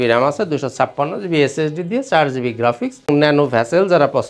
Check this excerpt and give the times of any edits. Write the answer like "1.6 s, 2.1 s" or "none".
3.1 s